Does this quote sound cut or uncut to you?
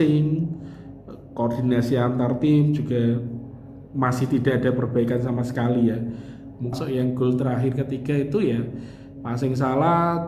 cut